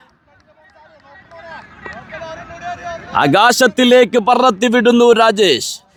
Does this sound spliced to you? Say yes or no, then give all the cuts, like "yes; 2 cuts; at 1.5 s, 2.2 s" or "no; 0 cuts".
no; 0 cuts